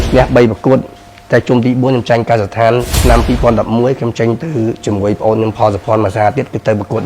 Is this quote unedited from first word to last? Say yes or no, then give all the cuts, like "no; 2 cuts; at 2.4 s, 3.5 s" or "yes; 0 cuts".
no; 1 cut; at 2.9 s